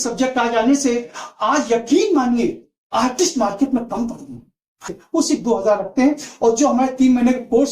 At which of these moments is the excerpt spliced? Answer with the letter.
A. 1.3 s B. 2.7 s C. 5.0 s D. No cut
C